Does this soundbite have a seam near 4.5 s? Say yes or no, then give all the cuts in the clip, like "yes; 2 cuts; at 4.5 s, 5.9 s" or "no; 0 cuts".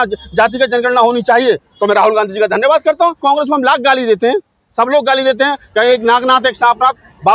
no; 1 cut; at 3.2 s